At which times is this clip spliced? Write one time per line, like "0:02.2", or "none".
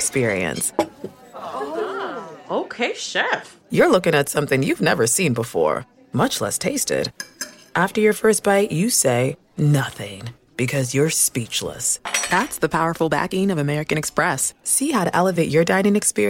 none